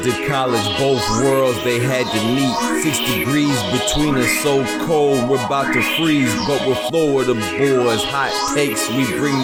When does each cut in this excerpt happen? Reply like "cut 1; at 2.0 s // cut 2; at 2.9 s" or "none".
none